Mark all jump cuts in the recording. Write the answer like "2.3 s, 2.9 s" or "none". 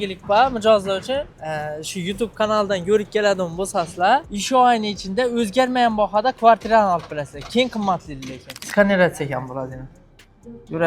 1.4 s, 4.3 s, 8.5 s

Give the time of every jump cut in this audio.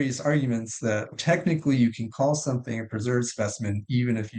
1.1 s

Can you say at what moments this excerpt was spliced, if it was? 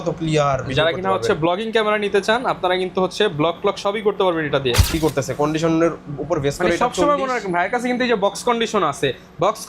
5.0 s

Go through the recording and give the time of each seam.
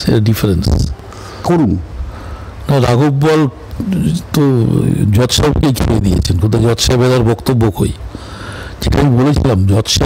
1.4 s

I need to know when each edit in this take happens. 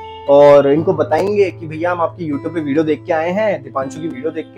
none

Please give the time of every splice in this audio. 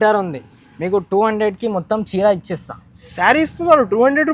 none

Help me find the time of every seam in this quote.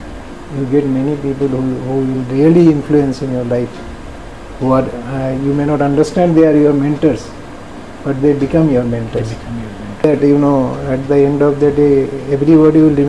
10.0 s

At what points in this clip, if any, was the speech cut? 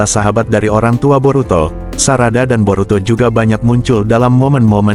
none

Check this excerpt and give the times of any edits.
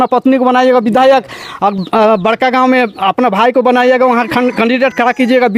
none

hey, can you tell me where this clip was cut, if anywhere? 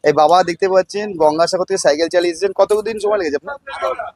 none

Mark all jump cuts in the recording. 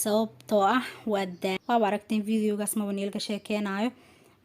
1.6 s

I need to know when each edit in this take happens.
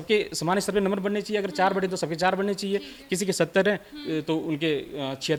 none

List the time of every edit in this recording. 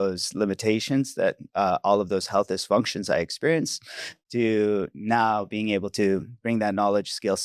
none

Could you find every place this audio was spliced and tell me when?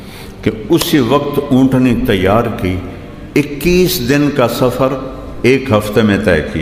none

